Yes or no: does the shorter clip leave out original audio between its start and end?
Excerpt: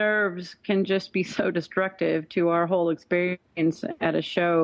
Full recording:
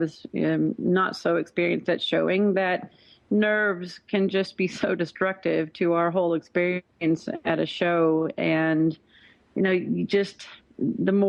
no